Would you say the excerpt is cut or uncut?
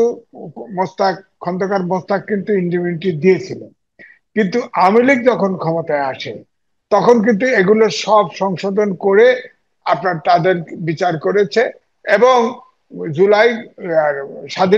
uncut